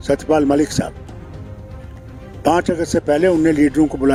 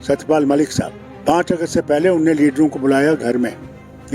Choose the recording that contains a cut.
second; 1 cut; at 1.0 s

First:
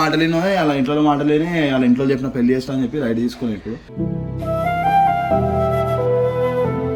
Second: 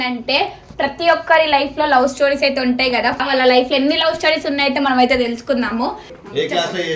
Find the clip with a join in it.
second; 2 cuts; at 3.2 s, 6.0 s

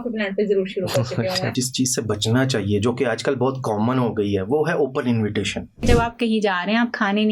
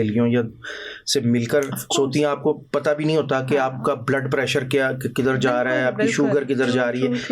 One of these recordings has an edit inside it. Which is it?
first; 2 cuts; at 1.5 s, 5.8 s

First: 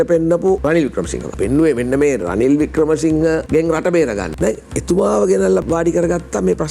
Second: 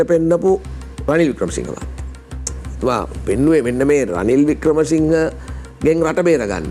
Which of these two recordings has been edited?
first; 4 cuts; at 1.1 s, 3.4 s, 4.3 s, 5.6 s

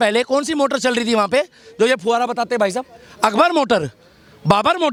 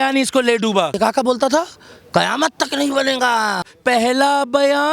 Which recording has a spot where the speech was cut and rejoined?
second; 2 cuts; at 1.0 s, 3.7 s

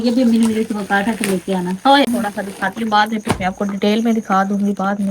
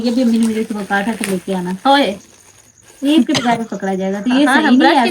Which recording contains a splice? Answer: first; 1 cut; at 2.1 s

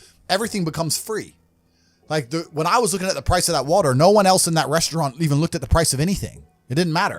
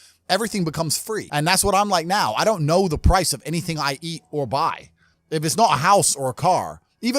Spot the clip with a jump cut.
second; 1 cut; at 1.3 s

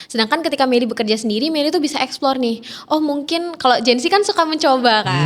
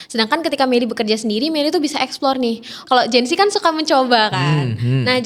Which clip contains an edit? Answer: second; 1 cut; at 2.8 s

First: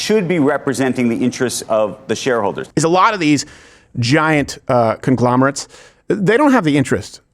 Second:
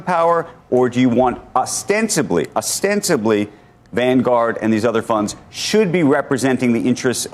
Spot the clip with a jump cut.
first; 1 cut; at 2.6 s

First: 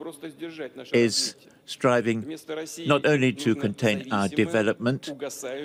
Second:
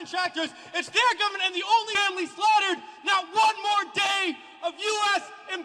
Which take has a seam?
second; 1 cut; at 1.9 s

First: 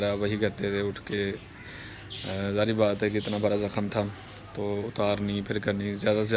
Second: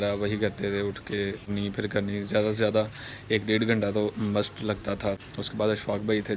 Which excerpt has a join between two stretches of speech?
second; 2 cuts; at 1.5 s, 5.3 s

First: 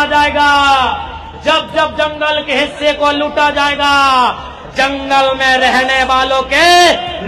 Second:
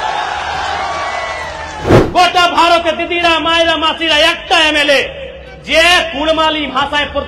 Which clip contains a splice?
second; 1 cut; at 1.7 s

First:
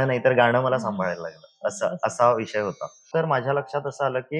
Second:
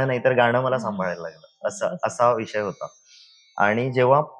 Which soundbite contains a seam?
first; 1 cut; at 3.0 s

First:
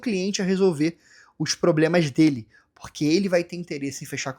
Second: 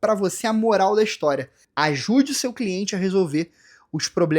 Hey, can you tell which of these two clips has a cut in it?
second; 1 cut; at 1.6 s

